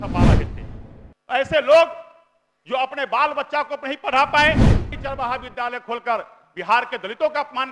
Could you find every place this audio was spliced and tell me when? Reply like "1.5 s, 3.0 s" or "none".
5.0 s

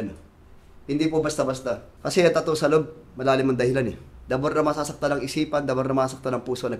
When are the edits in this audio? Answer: 1.9 s, 4.1 s

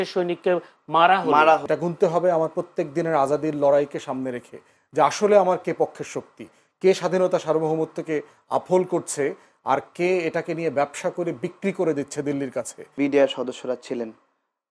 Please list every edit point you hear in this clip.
1.6 s, 12.8 s

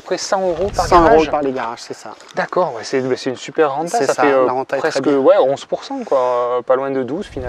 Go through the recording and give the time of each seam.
none

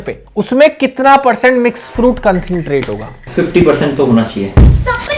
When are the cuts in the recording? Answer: 3.2 s

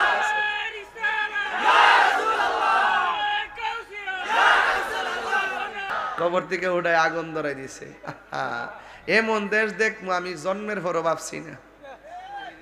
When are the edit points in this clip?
5.9 s

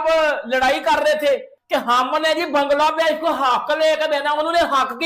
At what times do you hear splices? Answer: 1.5 s

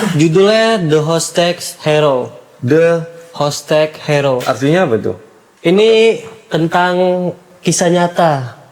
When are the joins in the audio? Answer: 5.5 s

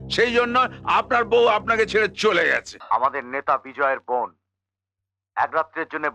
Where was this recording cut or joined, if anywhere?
2.7 s

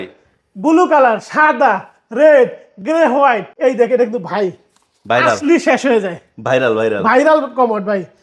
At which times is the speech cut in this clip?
3.5 s

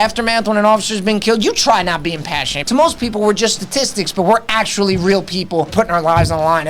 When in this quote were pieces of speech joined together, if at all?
2.5 s, 5.7 s

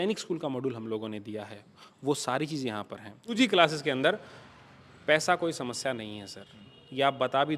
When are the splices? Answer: 3.3 s

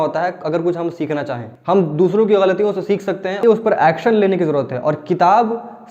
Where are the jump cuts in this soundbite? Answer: 3.4 s

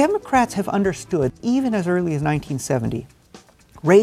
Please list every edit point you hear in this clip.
1.3 s

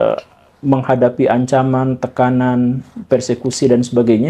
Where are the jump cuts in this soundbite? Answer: none

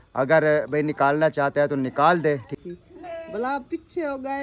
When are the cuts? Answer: 2.5 s

